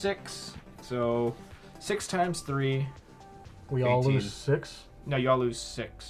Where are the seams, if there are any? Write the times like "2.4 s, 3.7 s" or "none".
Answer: none

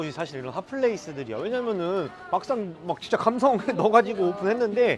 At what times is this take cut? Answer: none

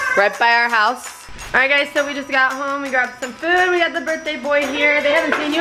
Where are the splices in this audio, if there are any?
1.3 s

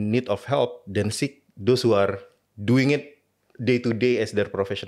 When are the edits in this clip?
none

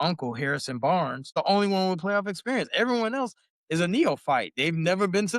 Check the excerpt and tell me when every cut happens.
1.3 s

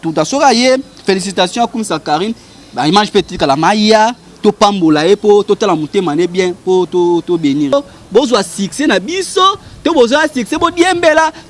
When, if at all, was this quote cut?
7.7 s

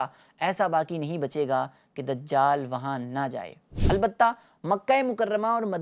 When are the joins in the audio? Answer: none

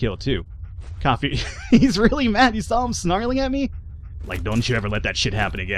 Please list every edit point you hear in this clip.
none

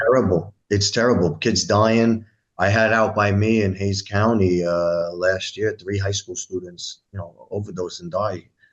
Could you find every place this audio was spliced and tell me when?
none

